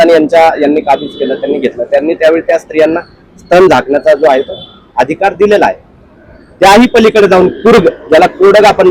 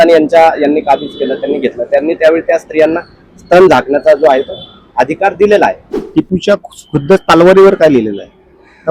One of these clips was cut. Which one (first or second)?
second